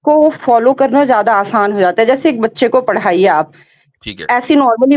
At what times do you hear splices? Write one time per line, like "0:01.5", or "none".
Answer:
none